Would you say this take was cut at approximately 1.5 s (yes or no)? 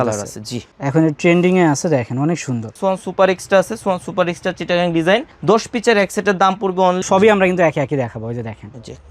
no